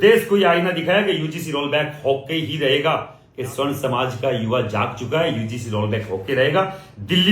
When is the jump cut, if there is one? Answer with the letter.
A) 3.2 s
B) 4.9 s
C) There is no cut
A